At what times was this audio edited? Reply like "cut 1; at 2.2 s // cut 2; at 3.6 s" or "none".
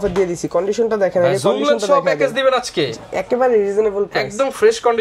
none